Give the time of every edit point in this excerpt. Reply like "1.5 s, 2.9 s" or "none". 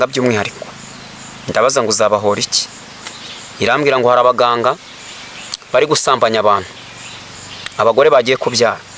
none